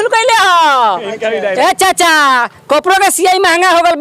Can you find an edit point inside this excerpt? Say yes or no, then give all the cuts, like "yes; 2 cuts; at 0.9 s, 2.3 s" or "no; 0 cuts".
yes; 1 cut; at 1.5 s